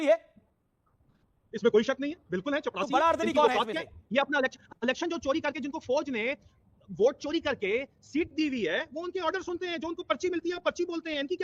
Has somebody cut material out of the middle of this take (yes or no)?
no